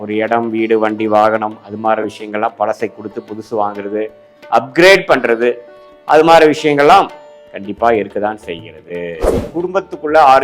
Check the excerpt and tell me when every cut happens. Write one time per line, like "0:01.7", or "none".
0:09.4